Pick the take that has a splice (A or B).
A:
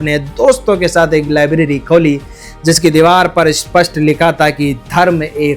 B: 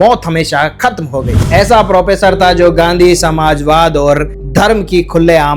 B